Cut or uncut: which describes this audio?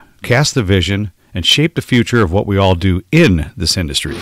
uncut